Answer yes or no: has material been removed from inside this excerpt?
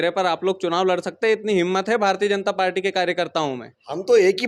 no